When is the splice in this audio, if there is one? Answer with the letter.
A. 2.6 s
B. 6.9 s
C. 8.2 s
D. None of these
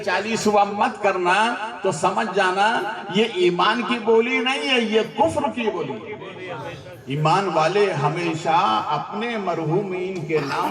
B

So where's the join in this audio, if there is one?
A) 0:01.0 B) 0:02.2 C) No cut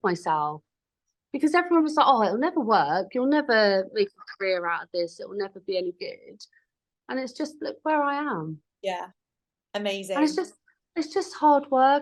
C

